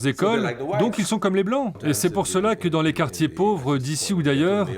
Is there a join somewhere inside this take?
yes; 1 cut; at 1.8 s

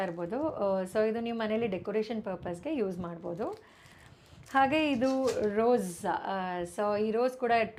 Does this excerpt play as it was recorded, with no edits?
yes; 0 cuts

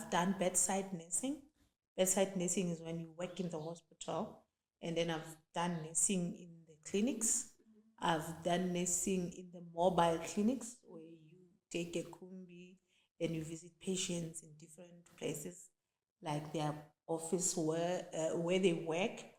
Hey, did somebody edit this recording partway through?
no; 0 cuts

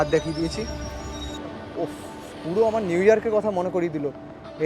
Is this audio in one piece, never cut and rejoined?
no; 1 cut; at 1.3 s

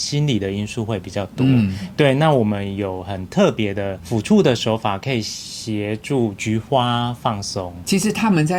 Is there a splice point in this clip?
no; 0 cuts

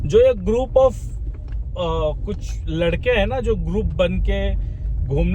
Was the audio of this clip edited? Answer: no; 0 cuts

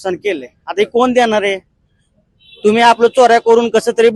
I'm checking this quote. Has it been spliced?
no; 0 cuts

